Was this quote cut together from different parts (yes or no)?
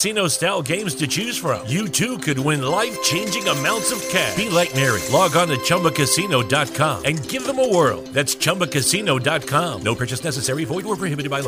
no